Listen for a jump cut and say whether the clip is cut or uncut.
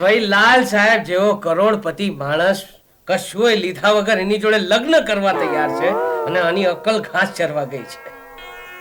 uncut